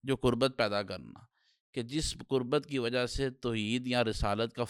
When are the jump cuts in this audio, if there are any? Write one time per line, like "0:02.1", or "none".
none